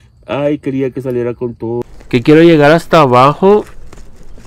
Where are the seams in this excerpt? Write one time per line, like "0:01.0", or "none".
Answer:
0:01.8

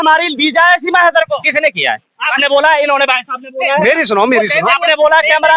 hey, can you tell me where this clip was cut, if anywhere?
none

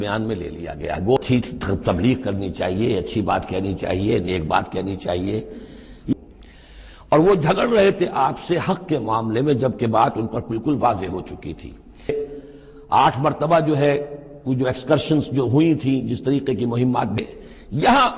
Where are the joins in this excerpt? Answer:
0:01.2
0:06.1
0:12.1
0:17.1

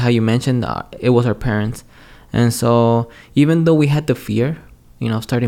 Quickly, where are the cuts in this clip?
none

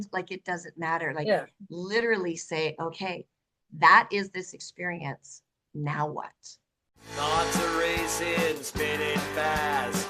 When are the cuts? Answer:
0:06.9

